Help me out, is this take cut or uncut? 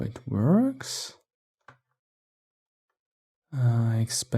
cut